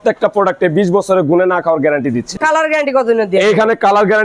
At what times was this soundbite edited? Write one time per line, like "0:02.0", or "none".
0:02.3